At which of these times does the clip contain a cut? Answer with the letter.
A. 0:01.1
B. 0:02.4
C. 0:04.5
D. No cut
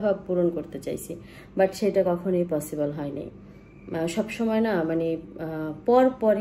D